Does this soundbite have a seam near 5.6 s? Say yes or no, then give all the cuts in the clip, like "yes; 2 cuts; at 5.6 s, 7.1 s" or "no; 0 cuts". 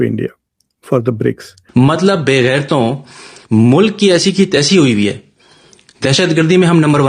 no; 1 cut; at 1.5 s